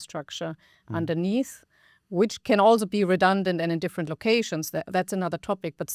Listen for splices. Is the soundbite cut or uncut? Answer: uncut